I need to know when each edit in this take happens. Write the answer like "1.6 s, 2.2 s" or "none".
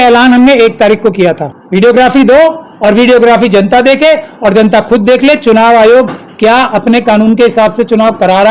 1.5 s